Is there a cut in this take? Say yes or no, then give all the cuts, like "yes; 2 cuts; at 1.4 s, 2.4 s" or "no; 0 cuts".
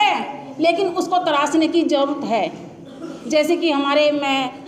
no; 0 cuts